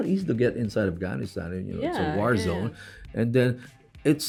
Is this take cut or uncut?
uncut